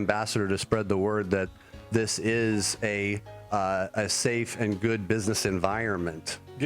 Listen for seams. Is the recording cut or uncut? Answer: uncut